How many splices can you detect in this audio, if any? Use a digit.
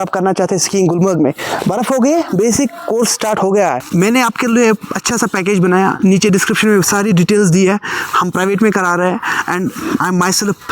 1